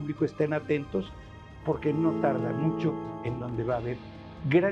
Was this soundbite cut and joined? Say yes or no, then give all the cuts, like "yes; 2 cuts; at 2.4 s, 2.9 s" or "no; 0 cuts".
yes; 1 cut; at 1.3 s